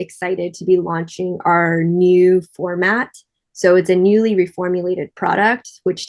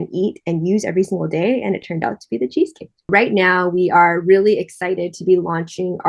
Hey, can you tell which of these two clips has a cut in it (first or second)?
second